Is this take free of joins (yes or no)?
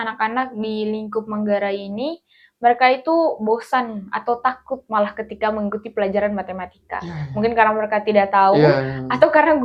yes